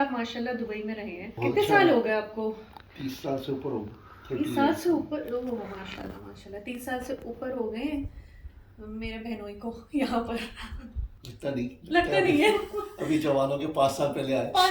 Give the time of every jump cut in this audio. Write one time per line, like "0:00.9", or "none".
0:01.3